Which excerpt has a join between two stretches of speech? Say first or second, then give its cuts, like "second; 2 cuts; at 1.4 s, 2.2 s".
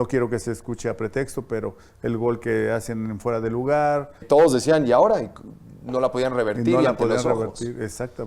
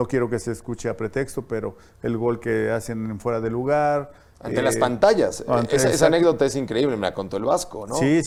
first; 1 cut; at 4.2 s